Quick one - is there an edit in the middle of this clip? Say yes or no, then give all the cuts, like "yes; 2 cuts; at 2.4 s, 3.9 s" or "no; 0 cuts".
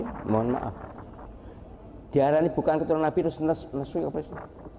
no; 0 cuts